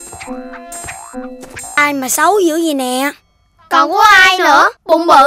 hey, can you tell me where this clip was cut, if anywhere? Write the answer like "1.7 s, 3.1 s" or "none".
1.8 s

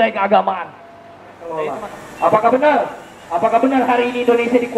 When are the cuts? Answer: 1.6 s

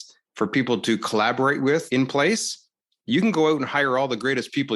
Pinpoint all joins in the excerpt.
1.9 s

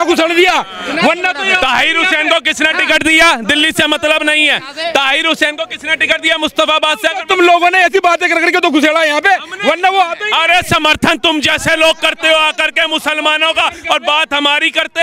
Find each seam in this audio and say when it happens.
none

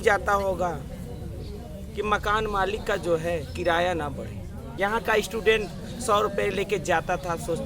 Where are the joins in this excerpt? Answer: 4.6 s

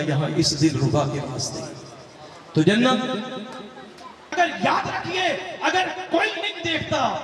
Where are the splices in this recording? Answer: 4.3 s

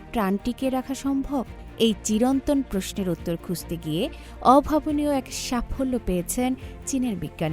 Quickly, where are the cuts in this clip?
none

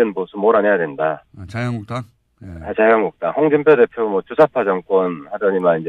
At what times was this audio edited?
3.1 s

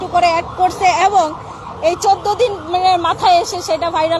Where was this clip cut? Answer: none

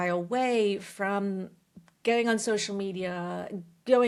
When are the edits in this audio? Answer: none

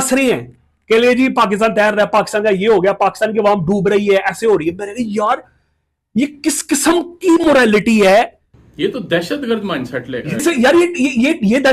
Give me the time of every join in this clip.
8.4 s

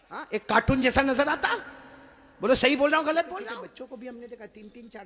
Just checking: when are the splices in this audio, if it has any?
3.4 s

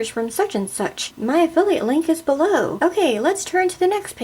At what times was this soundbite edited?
1.0 s, 2.7 s

